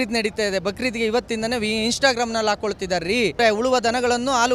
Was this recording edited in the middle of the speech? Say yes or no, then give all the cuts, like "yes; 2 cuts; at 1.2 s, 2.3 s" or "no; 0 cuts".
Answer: yes; 1 cut; at 3.4 s